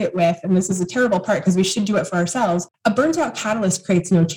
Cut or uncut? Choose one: cut